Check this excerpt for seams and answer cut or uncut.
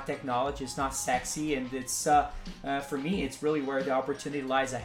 uncut